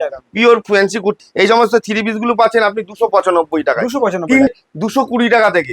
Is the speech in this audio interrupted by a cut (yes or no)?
yes